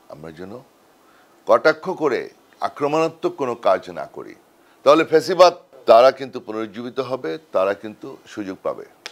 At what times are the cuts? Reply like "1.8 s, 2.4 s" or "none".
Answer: 5.7 s